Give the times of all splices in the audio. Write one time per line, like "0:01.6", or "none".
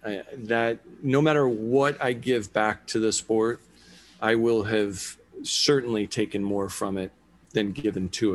0:07.4